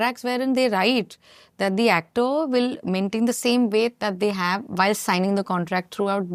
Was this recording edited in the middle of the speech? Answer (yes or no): no